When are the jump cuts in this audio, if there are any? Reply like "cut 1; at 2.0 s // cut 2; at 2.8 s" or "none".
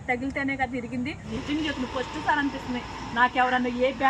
cut 1; at 1.3 s

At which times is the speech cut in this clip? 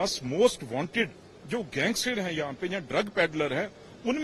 none

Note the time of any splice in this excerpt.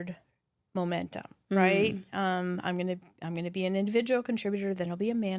none

